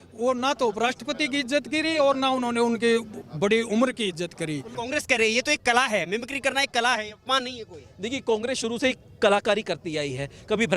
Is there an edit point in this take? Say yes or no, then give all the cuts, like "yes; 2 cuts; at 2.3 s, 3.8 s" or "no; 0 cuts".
yes; 1 cut; at 4.7 s